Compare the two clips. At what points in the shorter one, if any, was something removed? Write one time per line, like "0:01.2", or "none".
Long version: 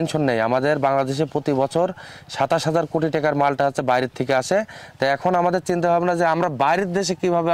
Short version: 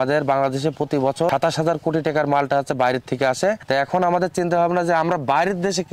0:01.3
0:03.6